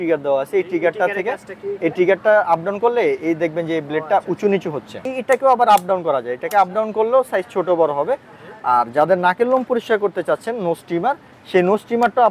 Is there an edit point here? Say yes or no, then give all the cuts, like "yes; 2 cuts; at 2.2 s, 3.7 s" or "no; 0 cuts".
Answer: yes; 1 cut; at 5.1 s